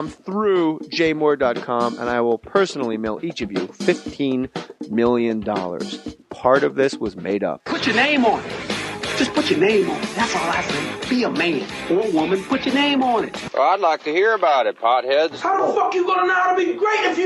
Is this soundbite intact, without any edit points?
yes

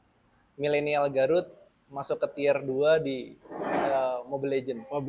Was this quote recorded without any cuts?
yes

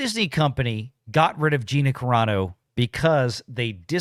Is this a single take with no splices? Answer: yes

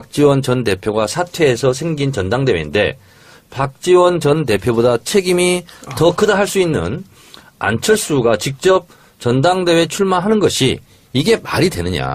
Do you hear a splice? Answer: yes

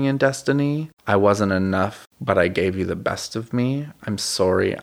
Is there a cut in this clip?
yes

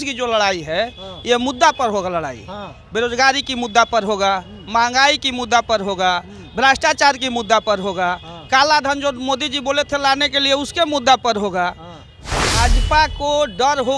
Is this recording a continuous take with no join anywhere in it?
no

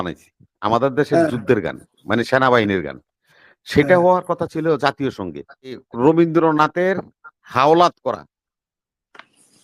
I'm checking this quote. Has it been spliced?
yes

